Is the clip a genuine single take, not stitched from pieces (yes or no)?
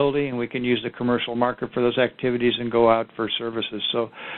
yes